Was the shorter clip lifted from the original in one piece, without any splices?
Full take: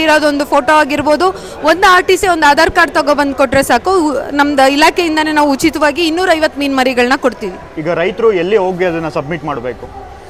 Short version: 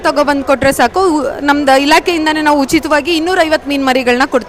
yes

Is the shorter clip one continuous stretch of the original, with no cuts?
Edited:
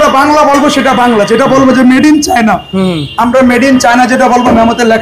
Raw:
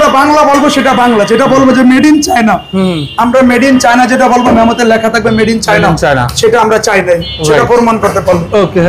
yes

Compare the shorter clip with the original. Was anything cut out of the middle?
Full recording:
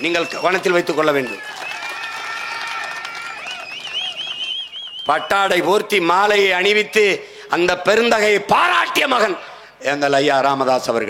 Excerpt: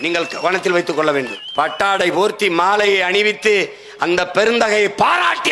yes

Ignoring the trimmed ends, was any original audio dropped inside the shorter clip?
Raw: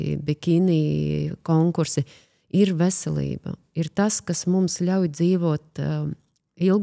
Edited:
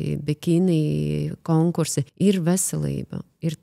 yes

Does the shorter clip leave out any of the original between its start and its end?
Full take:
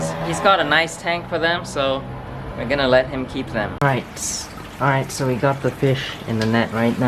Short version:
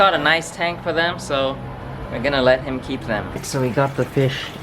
yes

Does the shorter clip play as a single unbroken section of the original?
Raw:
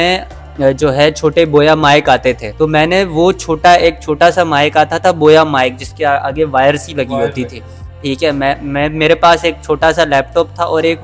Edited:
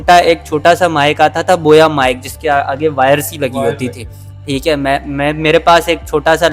yes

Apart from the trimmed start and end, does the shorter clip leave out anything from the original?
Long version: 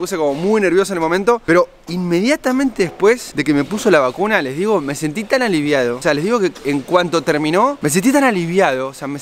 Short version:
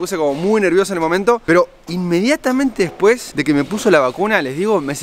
no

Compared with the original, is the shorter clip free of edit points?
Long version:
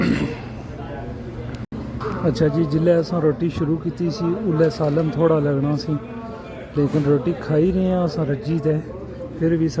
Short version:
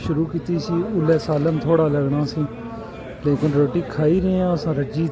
yes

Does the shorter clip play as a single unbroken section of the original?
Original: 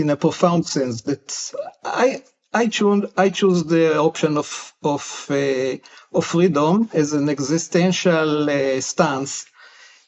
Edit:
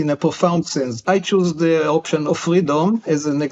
no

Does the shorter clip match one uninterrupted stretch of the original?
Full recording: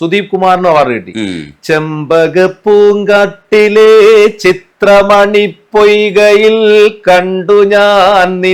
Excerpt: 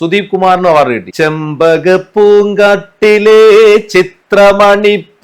no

